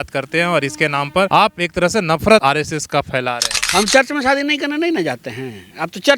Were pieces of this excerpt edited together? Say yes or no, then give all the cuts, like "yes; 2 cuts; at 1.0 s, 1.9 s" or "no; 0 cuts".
yes; 2 cuts; at 1.3 s, 2.4 s